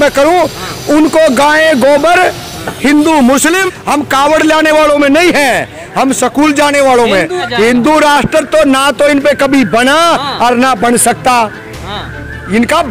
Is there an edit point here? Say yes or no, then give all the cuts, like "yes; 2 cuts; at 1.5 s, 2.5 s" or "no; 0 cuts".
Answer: yes; 2 cuts; at 3.6 s, 7.4 s